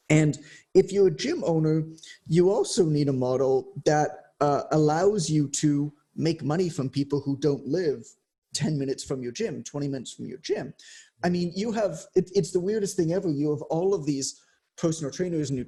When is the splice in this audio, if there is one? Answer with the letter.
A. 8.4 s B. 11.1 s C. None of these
C